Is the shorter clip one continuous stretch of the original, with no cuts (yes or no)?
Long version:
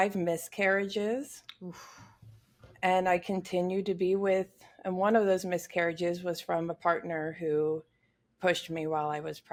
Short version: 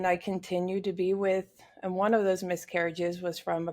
yes